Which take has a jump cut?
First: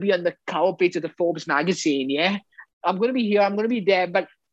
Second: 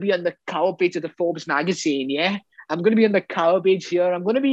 first; 1 cut; at 2.6 s

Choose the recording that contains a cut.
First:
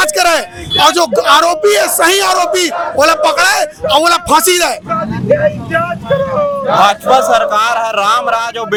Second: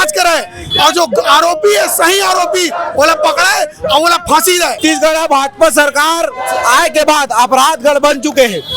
second; 1 cut; at 4.8 s

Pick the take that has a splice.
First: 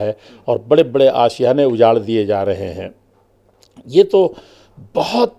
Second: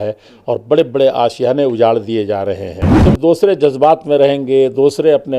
second; 1 cut; at 2.9 s

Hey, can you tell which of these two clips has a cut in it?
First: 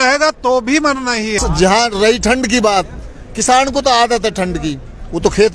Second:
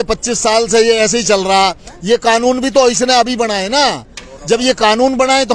first; 1 cut; at 1.4 s

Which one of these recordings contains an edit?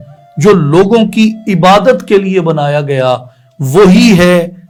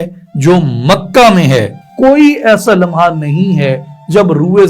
second; 1 cut; at 1.9 s

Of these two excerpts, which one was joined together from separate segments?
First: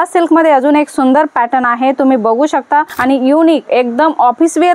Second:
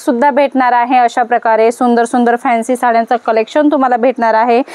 first; 1 cut; at 2.9 s

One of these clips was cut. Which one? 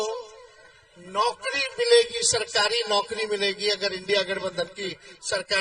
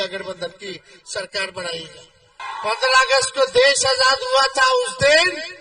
second; 1 cut; at 2.4 s

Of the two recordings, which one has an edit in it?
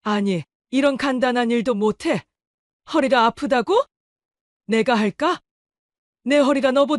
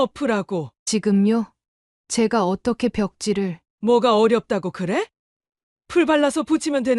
second; 1 cut; at 3.6 s

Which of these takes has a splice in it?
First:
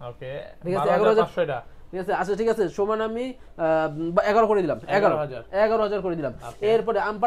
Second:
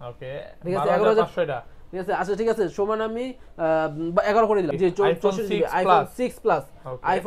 second; 1 cut; at 4.7 s

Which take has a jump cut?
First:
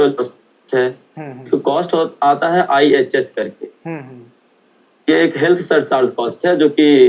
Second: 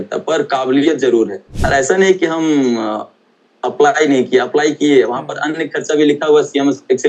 second; 1 cut; at 1.5 s

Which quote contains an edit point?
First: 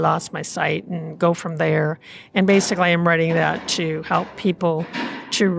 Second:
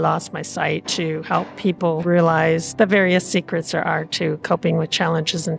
second; 2 cuts; at 0.9 s, 2.0 s

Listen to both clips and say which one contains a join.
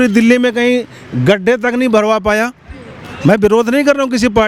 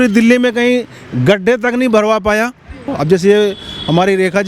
second; 1 cut; at 3.0 s

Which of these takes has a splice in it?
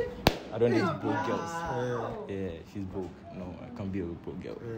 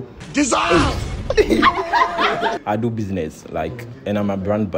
second; 1 cut; at 2.6 s

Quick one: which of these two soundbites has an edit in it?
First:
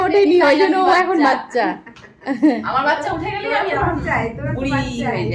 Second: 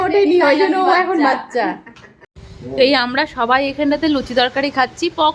second; 1 cut; at 2.3 s

